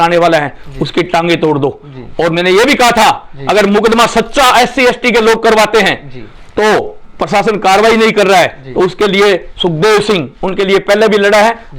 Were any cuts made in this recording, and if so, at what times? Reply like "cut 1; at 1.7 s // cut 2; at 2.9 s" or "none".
none